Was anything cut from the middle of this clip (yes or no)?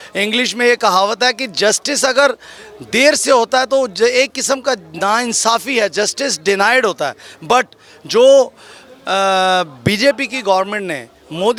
no